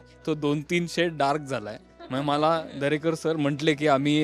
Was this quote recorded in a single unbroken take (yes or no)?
yes